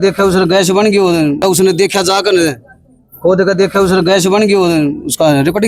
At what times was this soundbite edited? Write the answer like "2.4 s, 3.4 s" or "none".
none